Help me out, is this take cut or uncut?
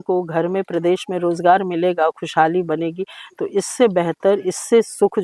uncut